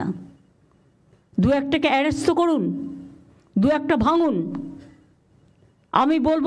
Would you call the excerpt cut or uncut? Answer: uncut